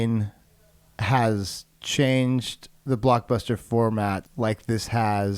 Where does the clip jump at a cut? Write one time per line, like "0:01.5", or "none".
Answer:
0:04.3

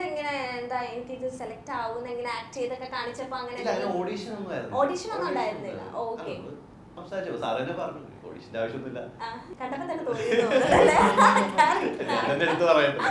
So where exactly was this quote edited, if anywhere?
none

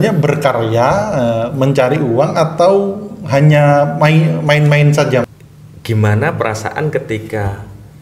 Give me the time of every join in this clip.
0:05.2

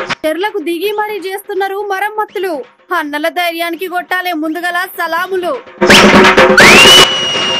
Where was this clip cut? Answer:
none

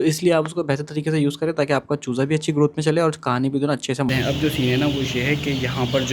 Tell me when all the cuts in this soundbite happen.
0:04.1

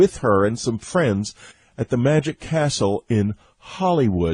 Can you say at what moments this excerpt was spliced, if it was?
0:03.0

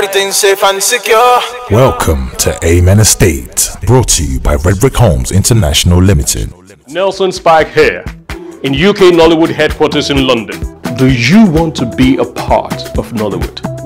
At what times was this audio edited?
0:06.8

